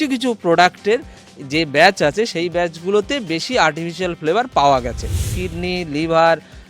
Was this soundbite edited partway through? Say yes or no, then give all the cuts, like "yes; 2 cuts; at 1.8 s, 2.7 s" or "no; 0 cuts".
yes; 1 cut; at 5.3 s